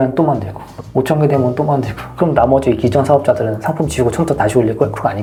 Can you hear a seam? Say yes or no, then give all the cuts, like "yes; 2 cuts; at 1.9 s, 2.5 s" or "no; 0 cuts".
no; 0 cuts